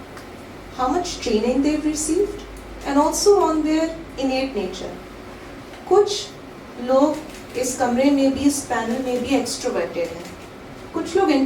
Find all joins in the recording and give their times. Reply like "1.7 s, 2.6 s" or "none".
none

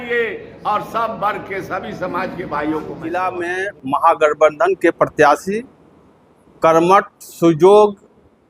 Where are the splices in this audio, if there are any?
3.1 s

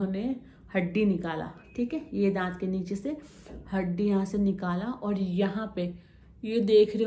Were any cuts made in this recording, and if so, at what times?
none

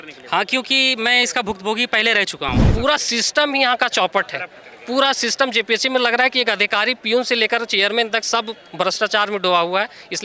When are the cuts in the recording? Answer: 2.6 s

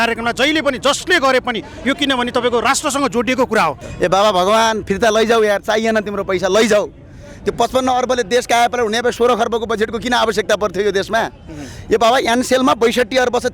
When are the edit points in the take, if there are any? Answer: 3.8 s

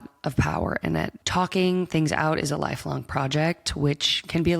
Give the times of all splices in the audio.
1.2 s

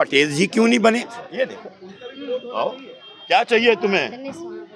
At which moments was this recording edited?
1.2 s

